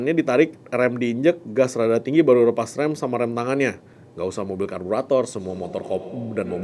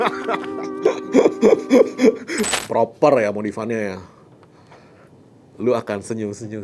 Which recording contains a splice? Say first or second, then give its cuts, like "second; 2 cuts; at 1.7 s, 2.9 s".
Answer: second; 1 cut; at 2.5 s